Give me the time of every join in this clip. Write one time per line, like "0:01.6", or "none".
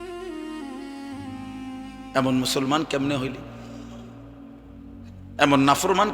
0:01.4
0:03.4
0:05.2